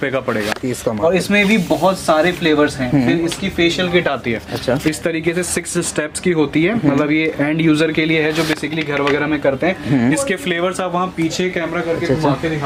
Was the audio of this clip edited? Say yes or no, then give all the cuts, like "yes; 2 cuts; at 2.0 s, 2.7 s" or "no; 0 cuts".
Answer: no; 0 cuts